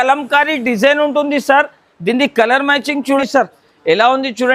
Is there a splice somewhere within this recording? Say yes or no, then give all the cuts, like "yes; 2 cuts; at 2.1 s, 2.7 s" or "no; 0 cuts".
yes; 1 cut; at 3.2 s